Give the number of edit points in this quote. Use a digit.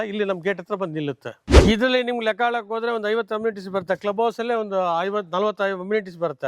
1